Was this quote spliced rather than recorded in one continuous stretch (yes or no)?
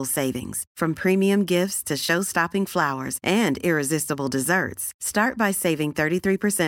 no